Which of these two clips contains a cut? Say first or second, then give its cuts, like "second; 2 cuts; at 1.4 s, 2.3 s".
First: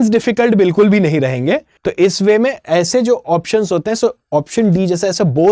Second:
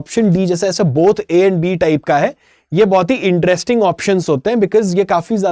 first; 1 cut; at 1.8 s